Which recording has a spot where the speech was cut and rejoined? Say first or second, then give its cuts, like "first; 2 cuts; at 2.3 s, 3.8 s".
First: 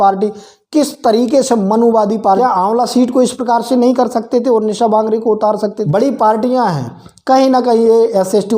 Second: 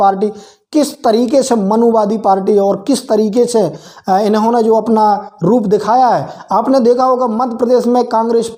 first; 2 cuts; at 2.4 s, 5.8 s